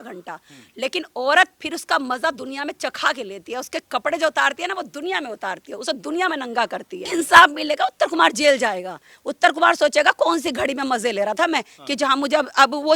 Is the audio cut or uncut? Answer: cut